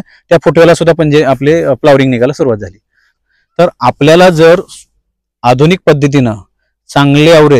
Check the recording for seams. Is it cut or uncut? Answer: cut